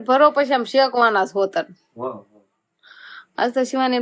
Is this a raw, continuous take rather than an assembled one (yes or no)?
yes